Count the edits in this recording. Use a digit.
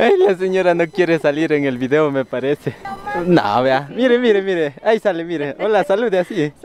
1